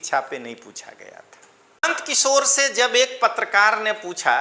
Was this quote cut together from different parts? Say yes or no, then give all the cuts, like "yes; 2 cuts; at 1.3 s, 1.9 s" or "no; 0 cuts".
yes; 1 cut; at 1.8 s